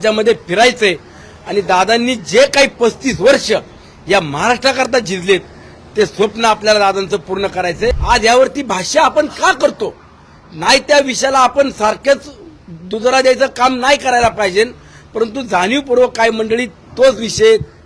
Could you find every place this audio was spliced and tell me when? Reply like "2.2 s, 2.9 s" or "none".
8.0 s